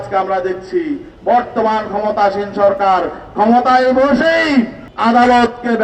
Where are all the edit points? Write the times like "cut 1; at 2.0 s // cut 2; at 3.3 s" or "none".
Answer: cut 1; at 4.8 s